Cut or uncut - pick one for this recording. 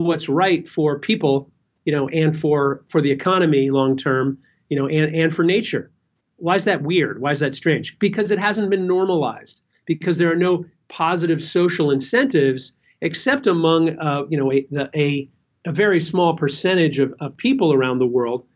uncut